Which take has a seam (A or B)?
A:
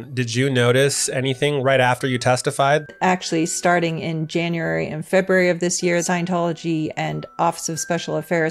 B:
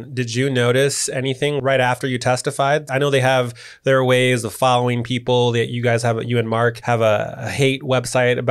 A